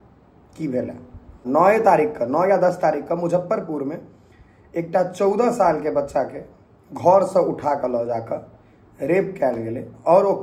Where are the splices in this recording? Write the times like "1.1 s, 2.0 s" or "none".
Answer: 1.4 s